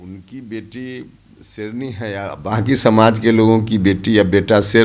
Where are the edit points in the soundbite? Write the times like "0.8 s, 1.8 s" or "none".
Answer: none